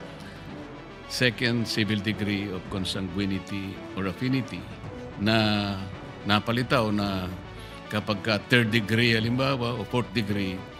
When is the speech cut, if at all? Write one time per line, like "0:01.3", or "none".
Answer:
none